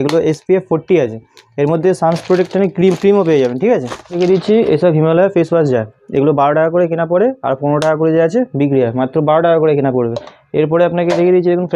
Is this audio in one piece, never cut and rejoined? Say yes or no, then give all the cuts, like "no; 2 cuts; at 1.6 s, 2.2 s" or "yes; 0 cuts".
yes; 0 cuts